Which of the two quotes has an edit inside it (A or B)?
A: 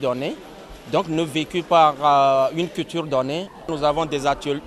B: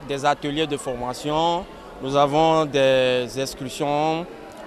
A